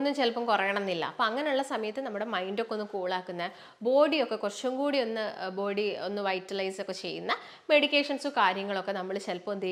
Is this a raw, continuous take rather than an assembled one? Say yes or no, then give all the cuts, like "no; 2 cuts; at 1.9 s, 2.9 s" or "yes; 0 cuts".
yes; 0 cuts